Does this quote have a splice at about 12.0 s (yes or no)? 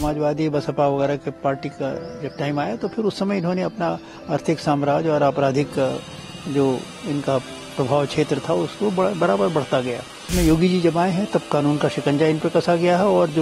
no